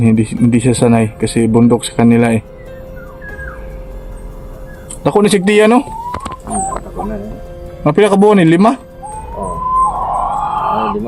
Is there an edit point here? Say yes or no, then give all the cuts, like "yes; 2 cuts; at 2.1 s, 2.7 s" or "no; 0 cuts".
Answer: no; 0 cuts